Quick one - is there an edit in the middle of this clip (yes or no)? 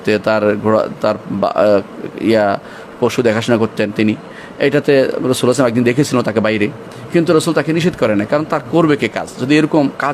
no